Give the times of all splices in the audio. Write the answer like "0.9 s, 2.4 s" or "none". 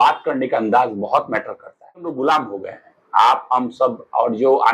2.2 s